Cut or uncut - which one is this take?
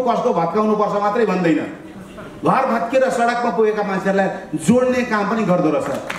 uncut